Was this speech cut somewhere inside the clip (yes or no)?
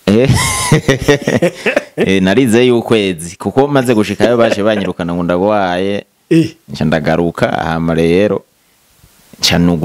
no